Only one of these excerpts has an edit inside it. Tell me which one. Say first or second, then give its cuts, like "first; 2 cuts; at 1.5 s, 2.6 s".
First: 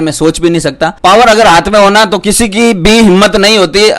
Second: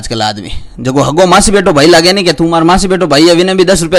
first; 1 cut; at 0.9 s